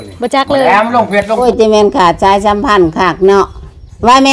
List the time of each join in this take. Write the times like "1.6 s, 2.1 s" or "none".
1.4 s